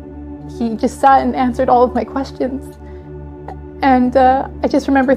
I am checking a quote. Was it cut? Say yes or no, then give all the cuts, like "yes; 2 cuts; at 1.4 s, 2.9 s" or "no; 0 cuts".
no; 0 cuts